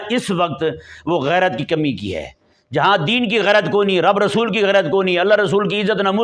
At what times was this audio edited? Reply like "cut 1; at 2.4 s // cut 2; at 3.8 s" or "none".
none